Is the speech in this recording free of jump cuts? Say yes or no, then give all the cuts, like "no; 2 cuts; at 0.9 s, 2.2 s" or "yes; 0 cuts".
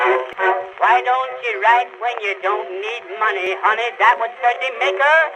no; 1 cut; at 3.4 s